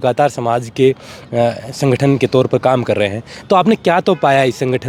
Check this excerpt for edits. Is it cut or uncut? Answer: uncut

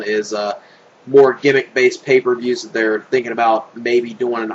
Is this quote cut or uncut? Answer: cut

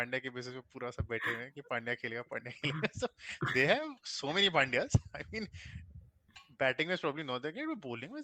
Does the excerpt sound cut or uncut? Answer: uncut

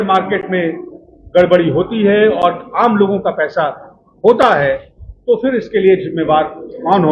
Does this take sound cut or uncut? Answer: uncut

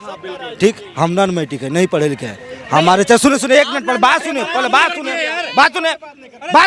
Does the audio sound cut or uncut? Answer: uncut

